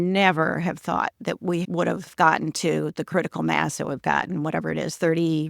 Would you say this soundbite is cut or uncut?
cut